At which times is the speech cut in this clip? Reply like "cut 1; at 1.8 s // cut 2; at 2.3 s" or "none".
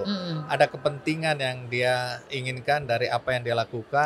none